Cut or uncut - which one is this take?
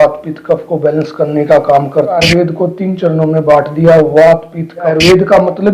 cut